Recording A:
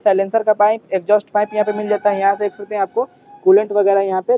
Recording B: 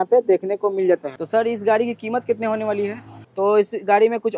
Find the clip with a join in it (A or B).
B